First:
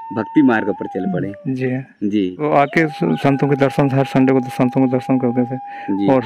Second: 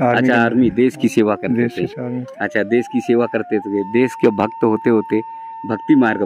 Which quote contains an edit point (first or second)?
first